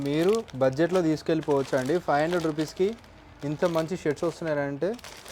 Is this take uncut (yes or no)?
yes